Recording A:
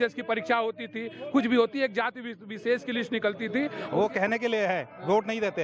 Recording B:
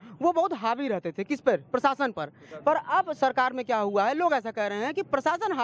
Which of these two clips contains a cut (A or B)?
A